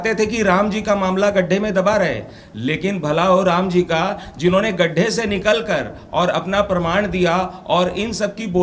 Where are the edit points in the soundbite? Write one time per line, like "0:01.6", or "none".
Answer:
none